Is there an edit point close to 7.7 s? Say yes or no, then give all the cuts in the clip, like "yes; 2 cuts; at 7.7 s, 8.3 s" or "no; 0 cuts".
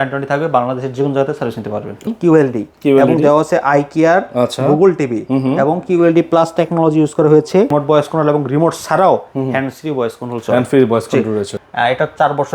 yes; 3 cuts; at 2.0 s, 7.7 s, 11.5 s